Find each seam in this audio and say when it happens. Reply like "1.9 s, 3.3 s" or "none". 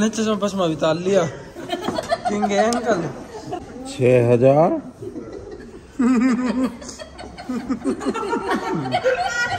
3.6 s